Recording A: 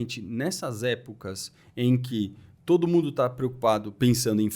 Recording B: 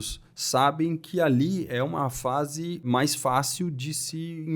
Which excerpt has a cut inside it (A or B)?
B